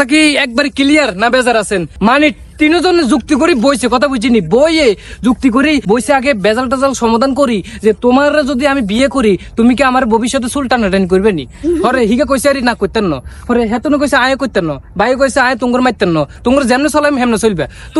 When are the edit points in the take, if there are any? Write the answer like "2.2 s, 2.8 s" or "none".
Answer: 1.9 s, 5.8 s, 16.3 s